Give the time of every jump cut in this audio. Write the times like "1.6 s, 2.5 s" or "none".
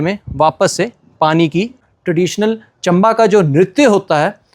1.9 s